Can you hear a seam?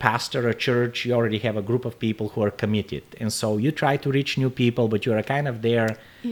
no; 0 cuts

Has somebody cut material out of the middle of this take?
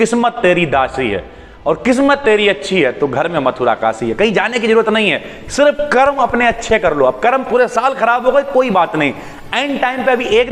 no; 0 cuts

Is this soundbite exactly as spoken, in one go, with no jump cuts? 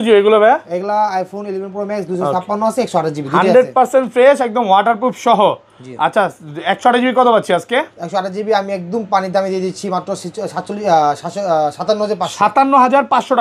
yes; 0 cuts

